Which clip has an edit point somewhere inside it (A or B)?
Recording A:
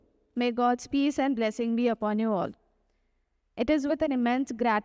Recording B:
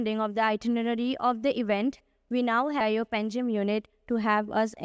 B